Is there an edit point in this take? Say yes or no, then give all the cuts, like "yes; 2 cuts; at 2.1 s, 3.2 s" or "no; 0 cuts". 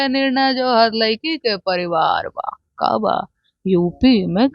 no; 0 cuts